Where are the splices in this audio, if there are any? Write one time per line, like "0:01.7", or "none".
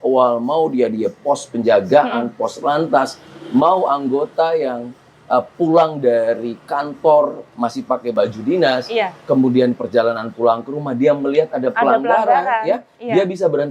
0:08.1